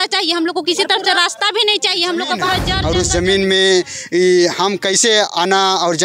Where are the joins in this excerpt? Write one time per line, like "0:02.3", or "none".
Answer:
0:02.7